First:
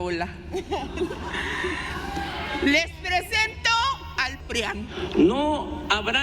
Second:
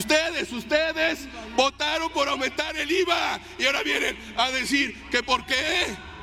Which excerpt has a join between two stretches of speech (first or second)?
first